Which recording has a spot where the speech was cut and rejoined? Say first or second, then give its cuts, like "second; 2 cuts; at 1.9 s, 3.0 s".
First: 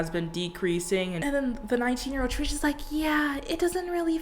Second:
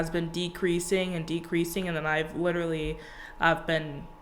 first; 1 cut; at 1.2 s